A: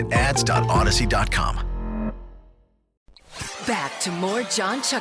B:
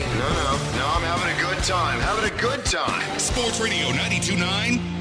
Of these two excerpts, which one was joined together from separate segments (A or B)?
A